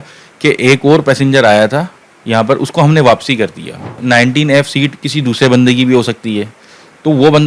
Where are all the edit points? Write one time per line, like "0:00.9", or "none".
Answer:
0:04.0